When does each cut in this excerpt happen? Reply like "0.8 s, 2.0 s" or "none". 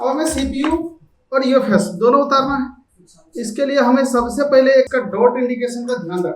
4.9 s

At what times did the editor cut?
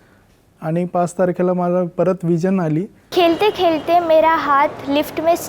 3.0 s

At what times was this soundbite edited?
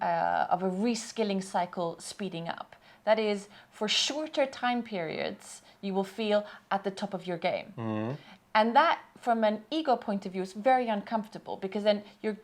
none

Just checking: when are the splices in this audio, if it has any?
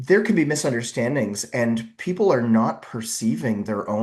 none

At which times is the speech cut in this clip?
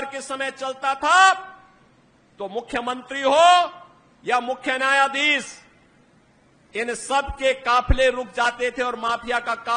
none

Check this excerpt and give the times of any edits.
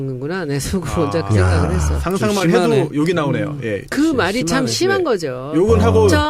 1.9 s

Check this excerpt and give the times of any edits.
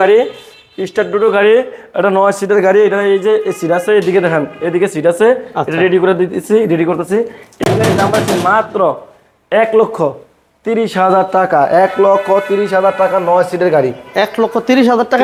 none

